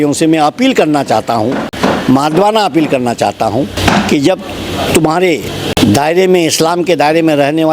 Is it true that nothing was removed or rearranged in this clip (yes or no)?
no